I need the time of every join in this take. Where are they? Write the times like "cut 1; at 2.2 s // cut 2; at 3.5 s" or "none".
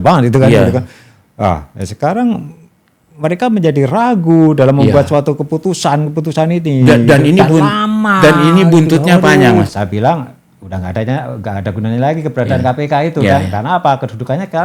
cut 1; at 9.7 s